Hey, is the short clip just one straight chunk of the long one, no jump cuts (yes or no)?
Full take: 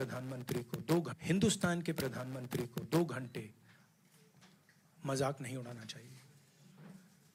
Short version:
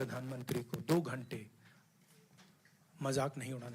no